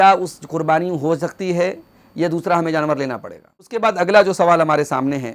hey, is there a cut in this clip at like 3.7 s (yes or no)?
yes